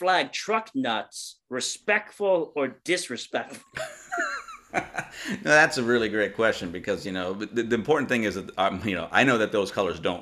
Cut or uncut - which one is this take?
uncut